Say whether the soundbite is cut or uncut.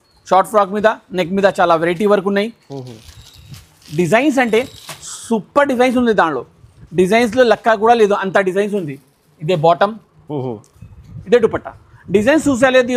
uncut